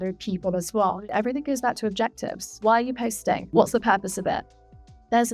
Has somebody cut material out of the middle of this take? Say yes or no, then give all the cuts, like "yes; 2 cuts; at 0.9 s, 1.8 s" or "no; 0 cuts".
yes; 3 cuts; at 1.1 s, 2.6 s, 3.4 s